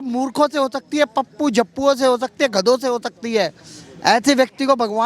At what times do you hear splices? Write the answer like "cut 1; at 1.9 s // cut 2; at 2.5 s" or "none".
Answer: none